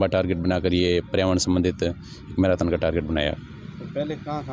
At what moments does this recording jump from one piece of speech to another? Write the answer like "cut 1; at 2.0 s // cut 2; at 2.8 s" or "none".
none